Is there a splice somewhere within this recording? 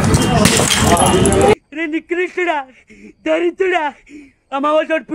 yes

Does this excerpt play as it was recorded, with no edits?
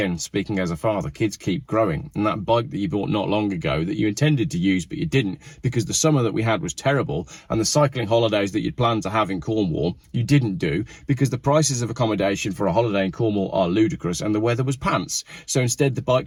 yes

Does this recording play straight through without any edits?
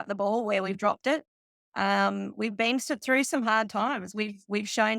yes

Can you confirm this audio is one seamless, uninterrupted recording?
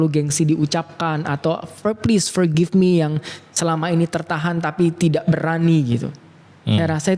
yes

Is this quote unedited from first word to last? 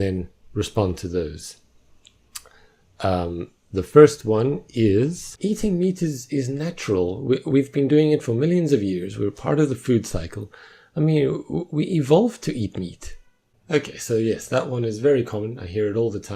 no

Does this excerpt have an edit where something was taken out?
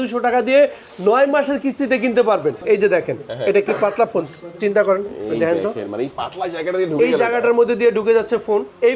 yes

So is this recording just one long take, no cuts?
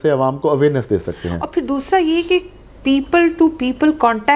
yes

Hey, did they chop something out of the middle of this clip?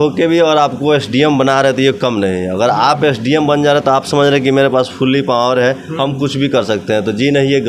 no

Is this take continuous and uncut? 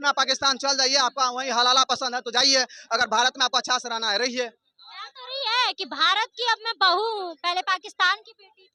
yes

